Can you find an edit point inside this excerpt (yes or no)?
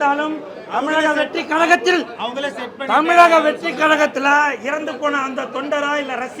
no